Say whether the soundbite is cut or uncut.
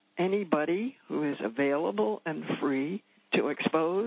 cut